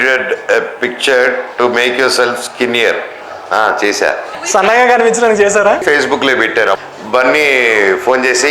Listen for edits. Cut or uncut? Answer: cut